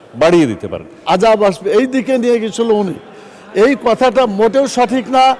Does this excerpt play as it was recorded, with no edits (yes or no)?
no